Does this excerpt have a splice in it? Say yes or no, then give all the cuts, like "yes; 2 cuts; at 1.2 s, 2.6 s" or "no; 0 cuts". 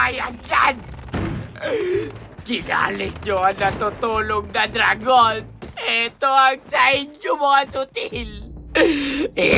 no; 0 cuts